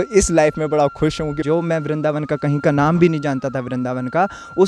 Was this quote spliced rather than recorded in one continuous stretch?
yes; 1 cut; at 1.4 s

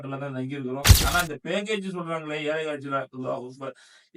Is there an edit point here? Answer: yes; 1 cut; at 1.0 s

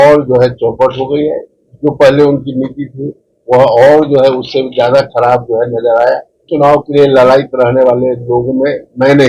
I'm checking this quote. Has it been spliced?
yes; 1 cut; at 6.4 s

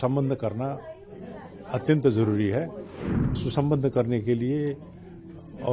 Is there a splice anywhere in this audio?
yes; 1 cut; at 3.3 s

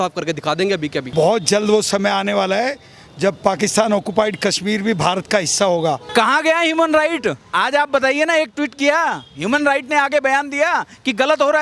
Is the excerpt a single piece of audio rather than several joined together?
no; 2 cuts; at 1.1 s, 6.0 s

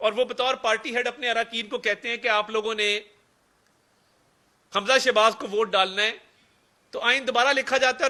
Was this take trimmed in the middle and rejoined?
no; 0 cuts

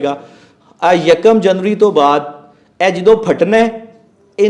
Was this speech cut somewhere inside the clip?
no; 0 cuts

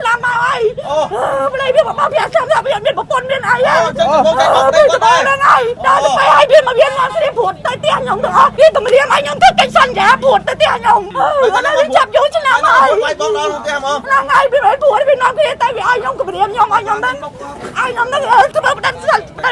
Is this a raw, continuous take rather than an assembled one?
no; 4 cuts; at 5.8 s, 8.5 s, 11.1 s, 18.5 s

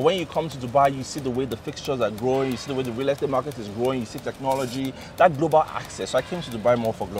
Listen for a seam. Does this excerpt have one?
no; 0 cuts

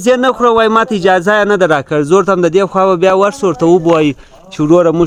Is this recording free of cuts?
yes; 0 cuts

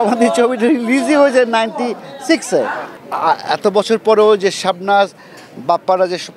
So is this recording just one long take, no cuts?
no; 1 cut; at 3.0 s

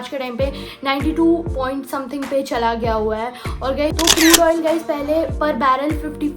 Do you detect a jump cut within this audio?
yes; 1 cut; at 3.9 s

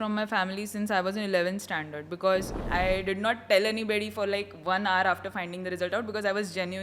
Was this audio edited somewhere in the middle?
yes; 1 cut; at 2.6 s

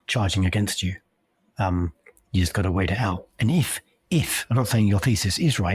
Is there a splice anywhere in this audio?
no; 0 cuts

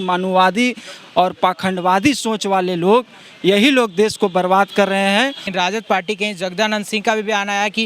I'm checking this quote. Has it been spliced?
yes; 1 cut; at 5.4 s

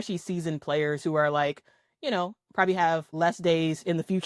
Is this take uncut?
no; 1 cut; at 3.1 s

